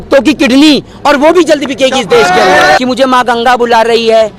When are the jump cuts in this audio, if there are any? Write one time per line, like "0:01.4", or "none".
0:02.8